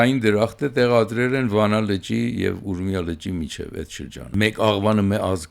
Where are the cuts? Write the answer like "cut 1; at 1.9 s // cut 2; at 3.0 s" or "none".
cut 1; at 4.2 s